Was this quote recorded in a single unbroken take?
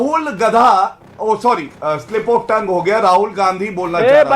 no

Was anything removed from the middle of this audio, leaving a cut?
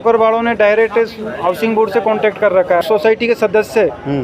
yes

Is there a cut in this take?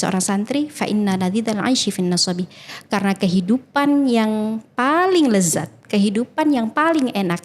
no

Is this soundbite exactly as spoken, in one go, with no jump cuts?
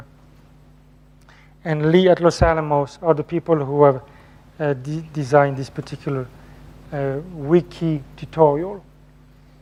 yes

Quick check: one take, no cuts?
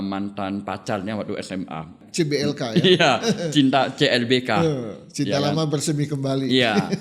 no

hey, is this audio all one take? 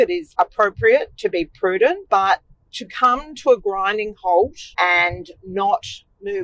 no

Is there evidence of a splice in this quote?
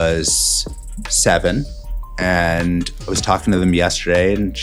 no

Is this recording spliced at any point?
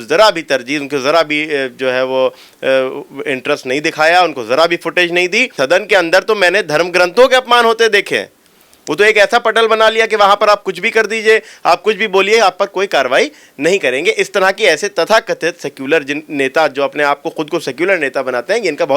yes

